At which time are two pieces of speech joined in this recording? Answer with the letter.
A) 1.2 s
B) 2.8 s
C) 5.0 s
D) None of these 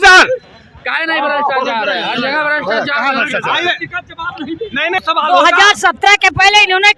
C